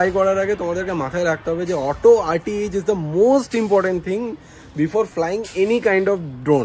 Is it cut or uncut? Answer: uncut